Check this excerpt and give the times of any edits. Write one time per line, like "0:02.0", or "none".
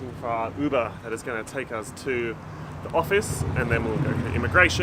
none